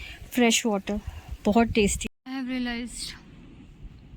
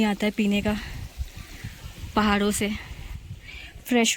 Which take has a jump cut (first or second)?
first